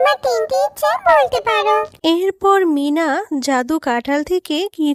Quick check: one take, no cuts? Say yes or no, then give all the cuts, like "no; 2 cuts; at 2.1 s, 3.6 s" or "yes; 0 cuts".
yes; 0 cuts